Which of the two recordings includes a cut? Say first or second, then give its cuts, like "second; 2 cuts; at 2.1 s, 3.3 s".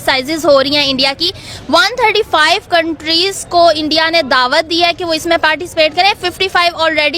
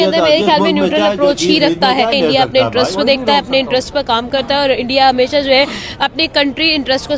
second; 1 cut; at 2.1 s